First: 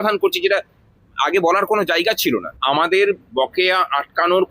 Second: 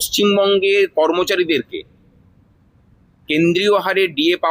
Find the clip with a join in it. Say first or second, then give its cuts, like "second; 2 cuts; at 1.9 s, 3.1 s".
first; 1 cut; at 2.5 s